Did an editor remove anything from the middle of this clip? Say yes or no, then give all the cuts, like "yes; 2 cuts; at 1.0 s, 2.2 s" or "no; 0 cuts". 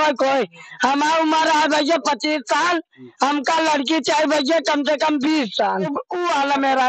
yes; 1 cut; at 6.0 s